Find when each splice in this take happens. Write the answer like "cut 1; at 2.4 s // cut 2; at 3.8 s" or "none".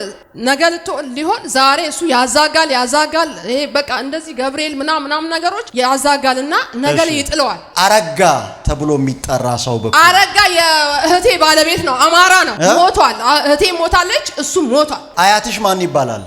cut 1; at 7.6 s